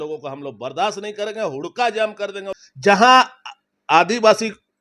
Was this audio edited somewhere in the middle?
yes; 1 cut; at 2.4 s

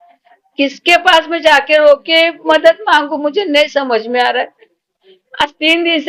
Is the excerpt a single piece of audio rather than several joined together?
yes; 0 cuts

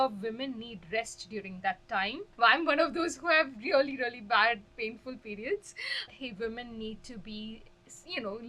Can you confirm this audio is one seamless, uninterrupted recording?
no; 2 cuts; at 2.2 s, 6.1 s

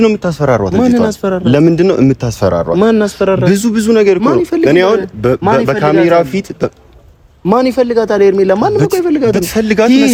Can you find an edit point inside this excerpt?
no; 0 cuts

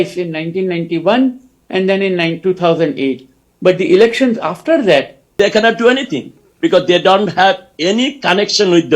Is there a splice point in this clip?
yes; 1 cut; at 5.2 s

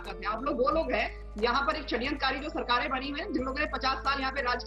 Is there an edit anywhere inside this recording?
no; 0 cuts

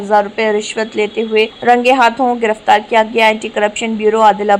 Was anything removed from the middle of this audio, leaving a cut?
yes; 1 cut; at 1.5 s

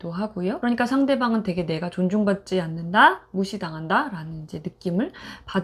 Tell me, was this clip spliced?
no; 0 cuts

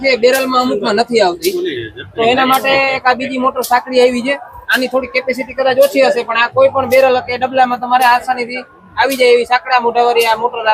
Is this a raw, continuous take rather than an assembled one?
yes; 0 cuts

